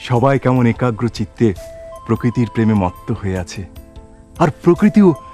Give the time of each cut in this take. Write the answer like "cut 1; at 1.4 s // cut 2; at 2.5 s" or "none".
none